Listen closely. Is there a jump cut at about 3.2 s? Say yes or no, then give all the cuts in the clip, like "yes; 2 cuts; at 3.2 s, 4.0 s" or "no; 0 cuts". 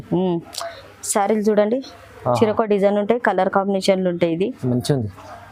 no; 0 cuts